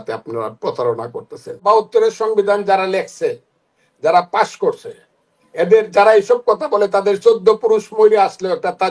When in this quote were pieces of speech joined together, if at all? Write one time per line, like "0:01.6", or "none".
0:01.6